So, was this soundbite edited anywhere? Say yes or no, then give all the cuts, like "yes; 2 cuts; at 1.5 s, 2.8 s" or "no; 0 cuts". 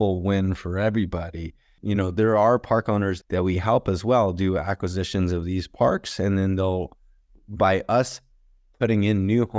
yes; 2 cuts; at 1.7 s, 3.2 s